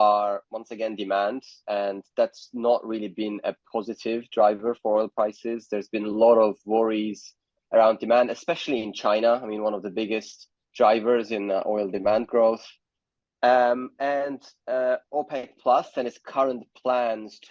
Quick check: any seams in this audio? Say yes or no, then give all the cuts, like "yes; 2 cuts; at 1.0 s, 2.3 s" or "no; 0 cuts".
no; 0 cuts